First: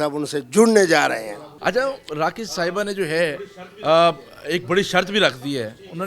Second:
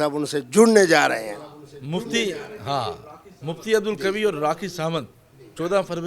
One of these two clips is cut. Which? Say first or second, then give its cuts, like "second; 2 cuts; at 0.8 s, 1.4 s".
first; 1 cut; at 1.5 s